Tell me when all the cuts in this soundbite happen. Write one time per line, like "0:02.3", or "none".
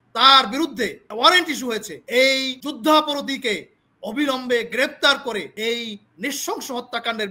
0:01.0
0:01.9
0:02.6
0:05.5